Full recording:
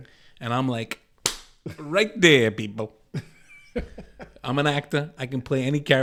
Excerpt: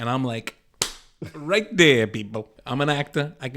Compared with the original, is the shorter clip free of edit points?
no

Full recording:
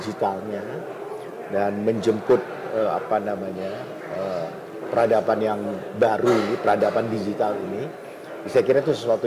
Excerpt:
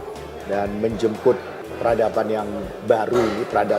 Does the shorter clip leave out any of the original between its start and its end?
yes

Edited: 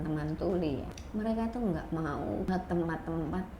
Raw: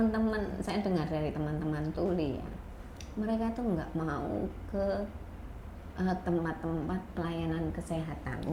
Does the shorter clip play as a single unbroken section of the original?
no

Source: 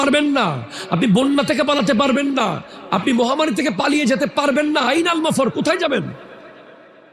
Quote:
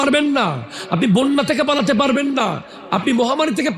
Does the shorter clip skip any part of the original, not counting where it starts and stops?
no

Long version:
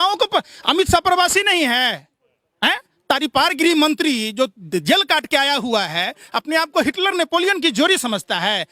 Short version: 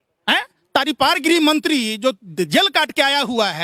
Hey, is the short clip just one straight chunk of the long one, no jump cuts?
yes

